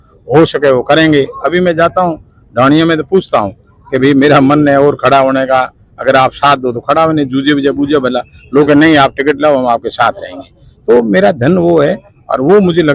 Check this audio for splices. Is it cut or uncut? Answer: uncut